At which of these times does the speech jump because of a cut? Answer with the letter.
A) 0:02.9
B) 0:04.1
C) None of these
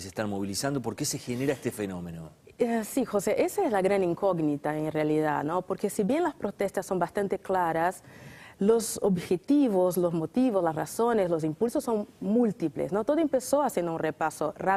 C